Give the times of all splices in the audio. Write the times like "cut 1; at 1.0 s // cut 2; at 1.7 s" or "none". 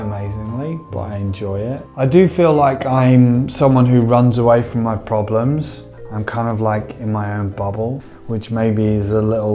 cut 1; at 5.9 s // cut 2; at 8.0 s